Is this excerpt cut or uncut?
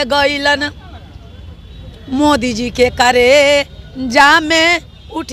uncut